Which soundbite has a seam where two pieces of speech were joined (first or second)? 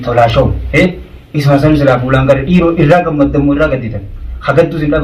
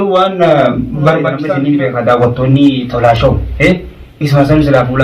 second